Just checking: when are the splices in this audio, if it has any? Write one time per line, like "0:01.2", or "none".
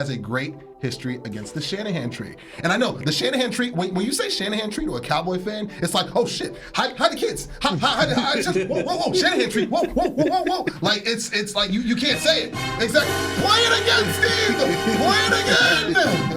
none